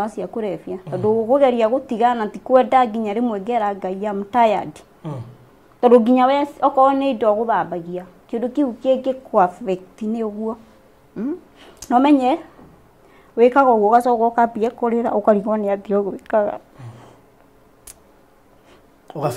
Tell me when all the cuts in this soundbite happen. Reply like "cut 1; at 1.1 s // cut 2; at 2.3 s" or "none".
none